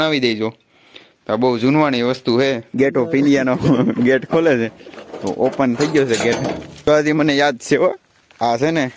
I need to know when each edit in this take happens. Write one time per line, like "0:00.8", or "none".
0:02.7
0:06.8